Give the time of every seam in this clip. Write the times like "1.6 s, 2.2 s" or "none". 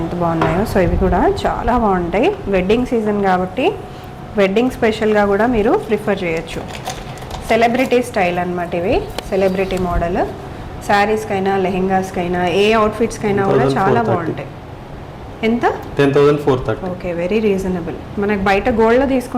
none